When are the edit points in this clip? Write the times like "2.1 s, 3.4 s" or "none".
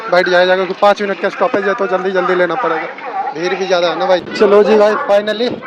4.3 s